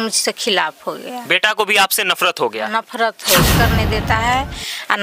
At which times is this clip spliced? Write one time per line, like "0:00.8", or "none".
0:03.5

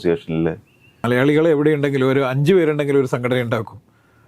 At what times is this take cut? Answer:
0:01.0

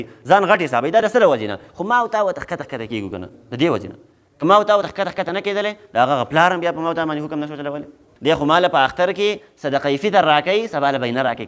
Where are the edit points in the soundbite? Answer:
0:08.1

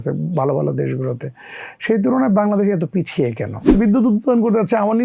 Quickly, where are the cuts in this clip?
0:03.7

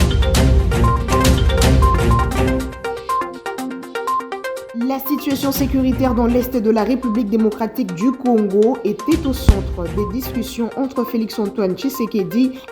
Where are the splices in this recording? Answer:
0:01.3
0:04.6

